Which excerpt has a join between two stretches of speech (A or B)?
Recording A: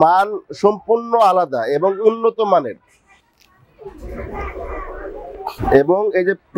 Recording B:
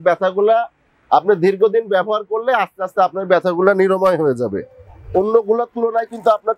B